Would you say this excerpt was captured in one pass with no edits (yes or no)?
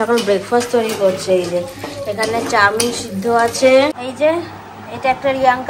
no